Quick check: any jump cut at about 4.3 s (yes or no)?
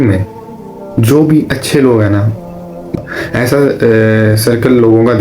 no